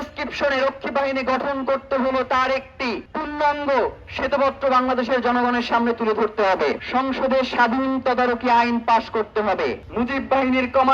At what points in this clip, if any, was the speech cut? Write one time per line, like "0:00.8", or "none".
0:03.1
0:06.8
0:09.8